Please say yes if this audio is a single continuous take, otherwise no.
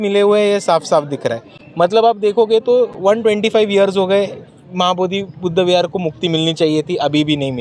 yes